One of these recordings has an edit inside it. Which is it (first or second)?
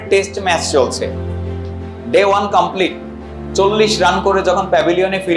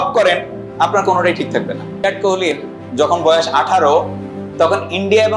second